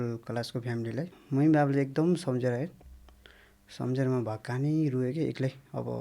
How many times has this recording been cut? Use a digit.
1